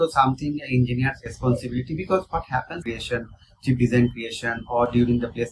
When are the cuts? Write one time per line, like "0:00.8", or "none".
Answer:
0:02.8